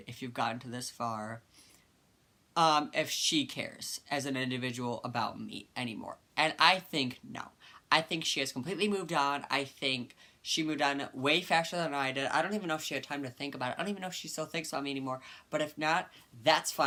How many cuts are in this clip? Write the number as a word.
zero